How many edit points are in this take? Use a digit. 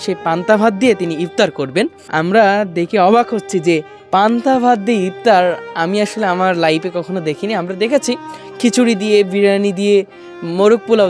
1